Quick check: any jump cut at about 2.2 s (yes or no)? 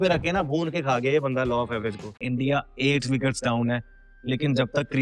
yes